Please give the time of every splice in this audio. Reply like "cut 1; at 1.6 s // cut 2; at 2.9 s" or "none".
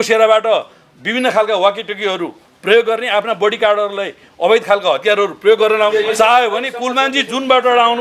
cut 1; at 5.9 s